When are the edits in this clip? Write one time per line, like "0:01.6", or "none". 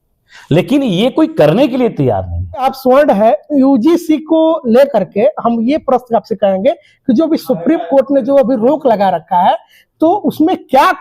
0:02.6